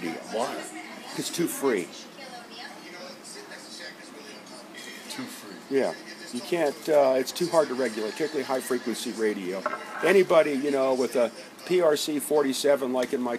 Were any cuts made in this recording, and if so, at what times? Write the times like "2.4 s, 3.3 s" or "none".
2.0 s